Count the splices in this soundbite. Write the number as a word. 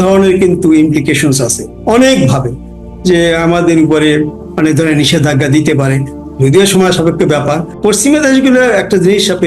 one